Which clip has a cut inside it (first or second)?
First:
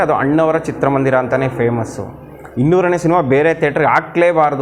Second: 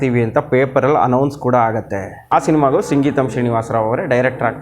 second